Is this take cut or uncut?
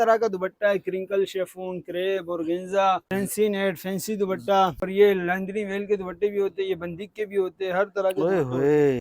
cut